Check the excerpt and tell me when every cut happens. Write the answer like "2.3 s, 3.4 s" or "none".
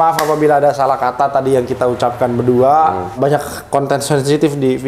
3.1 s